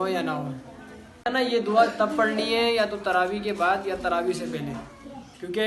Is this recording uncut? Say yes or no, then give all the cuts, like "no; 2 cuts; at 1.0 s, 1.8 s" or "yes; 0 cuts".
no; 1 cut; at 1.2 s